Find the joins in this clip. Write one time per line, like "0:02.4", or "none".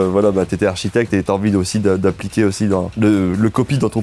0:02.9